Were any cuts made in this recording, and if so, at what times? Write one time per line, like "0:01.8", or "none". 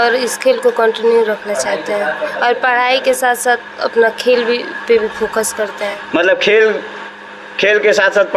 none